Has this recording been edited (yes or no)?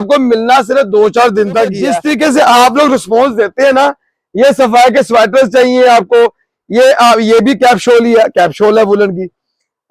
yes